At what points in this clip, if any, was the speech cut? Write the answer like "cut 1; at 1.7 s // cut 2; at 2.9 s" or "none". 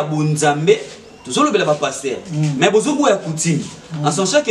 none